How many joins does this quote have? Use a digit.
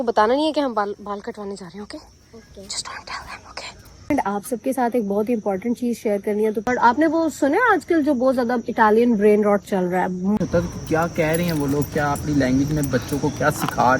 3